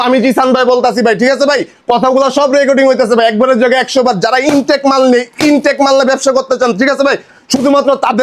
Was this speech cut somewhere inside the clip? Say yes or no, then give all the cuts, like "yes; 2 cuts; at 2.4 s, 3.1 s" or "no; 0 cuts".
no; 0 cuts